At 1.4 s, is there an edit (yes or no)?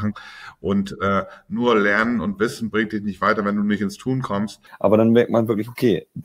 no